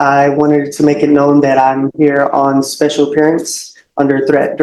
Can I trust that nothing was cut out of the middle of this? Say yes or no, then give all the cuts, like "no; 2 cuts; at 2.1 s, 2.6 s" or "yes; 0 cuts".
yes; 0 cuts